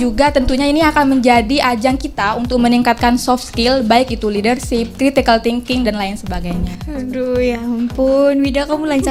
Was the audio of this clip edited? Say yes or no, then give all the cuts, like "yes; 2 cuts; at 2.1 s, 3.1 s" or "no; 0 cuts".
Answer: no; 0 cuts